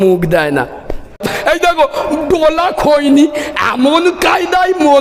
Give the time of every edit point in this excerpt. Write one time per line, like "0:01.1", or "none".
0:01.3